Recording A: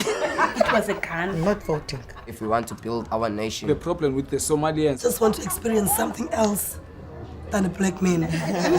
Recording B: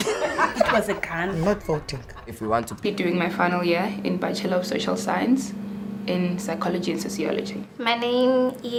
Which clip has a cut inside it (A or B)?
A